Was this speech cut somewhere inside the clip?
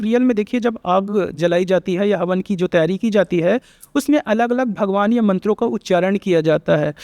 no; 0 cuts

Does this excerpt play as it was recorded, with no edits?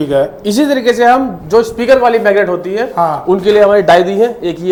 yes; 0 cuts

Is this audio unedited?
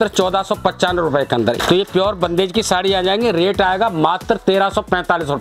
no; 1 cut; at 1.6 s

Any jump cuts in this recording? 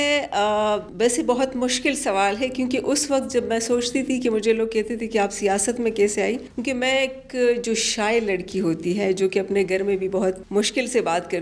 yes; 3 cuts; at 0.9 s, 6.5 s, 10.4 s

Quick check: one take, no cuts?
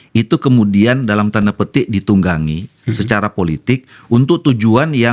yes; 0 cuts

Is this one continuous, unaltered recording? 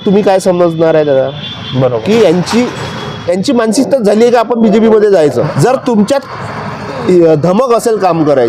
no; 1 cut; at 5.5 s

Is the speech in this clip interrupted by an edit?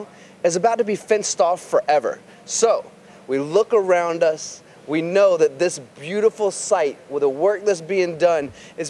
yes; 1 cut; at 3.0 s

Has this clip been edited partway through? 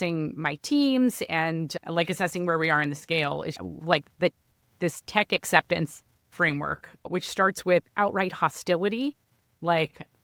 no; 0 cuts

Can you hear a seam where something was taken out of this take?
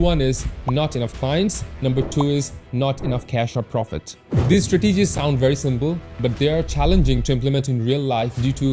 yes; 1 cut; at 4.3 s

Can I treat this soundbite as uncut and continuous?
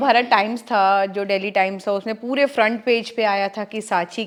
yes; 0 cuts

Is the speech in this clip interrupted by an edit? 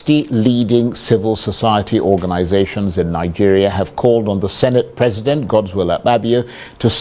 no; 0 cuts

